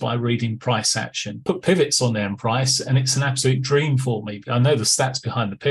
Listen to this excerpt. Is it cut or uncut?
cut